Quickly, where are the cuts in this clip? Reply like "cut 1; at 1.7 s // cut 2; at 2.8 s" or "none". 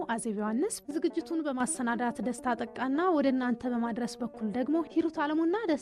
none